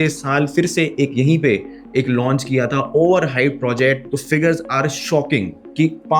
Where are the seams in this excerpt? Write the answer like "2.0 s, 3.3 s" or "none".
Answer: 4.0 s